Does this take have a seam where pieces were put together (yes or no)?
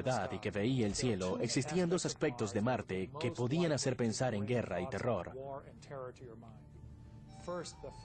no